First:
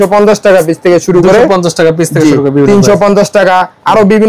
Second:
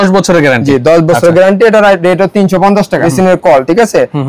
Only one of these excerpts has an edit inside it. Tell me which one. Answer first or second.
second